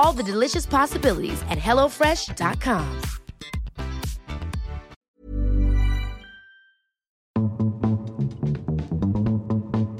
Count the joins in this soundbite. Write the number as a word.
two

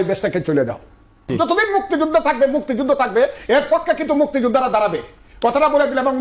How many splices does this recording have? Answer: one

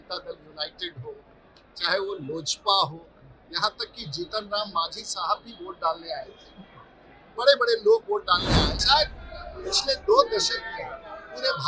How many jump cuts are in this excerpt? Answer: one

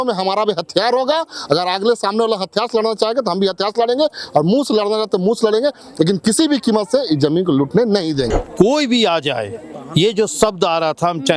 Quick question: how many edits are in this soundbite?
one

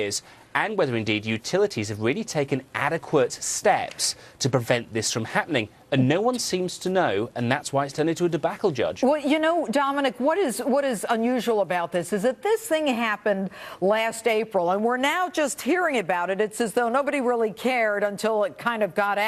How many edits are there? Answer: one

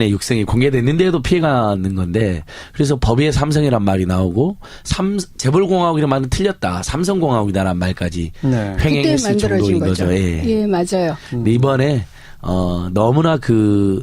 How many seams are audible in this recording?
one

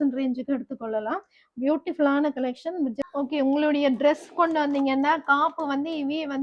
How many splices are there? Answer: one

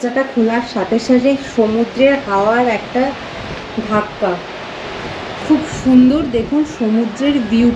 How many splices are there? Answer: zero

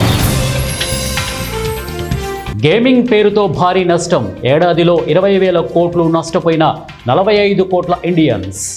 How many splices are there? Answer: zero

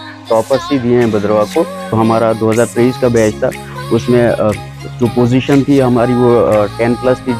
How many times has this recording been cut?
one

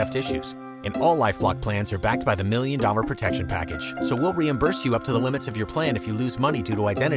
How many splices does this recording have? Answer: zero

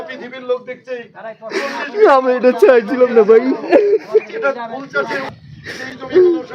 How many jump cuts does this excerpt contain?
one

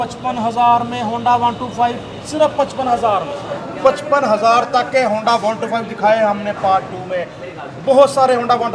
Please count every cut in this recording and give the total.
one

